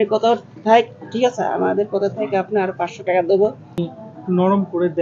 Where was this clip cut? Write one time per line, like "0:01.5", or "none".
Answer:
0:03.8